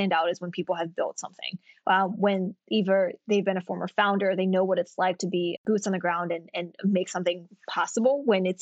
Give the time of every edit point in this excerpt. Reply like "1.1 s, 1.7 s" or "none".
none